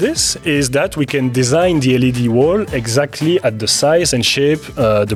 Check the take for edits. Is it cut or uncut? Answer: uncut